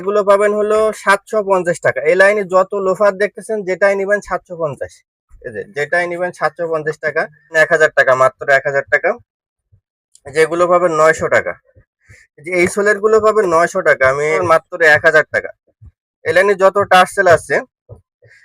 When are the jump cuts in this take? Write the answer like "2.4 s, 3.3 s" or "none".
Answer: 7.5 s, 14.4 s